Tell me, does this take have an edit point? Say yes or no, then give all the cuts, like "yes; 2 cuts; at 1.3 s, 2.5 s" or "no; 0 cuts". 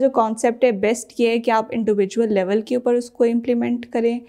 no; 0 cuts